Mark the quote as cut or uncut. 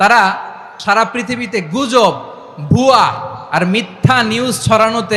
uncut